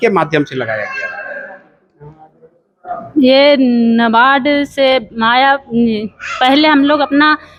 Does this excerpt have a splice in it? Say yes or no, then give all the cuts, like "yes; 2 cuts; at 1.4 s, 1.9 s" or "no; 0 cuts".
no; 0 cuts